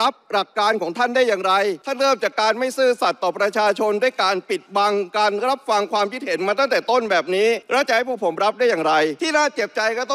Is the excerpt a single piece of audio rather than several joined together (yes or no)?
no